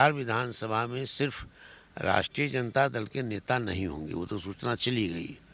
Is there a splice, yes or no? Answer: no